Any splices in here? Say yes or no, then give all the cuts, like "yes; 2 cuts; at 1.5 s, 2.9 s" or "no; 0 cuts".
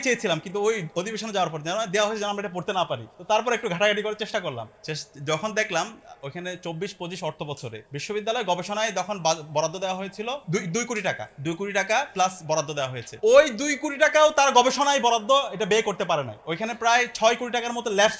no; 0 cuts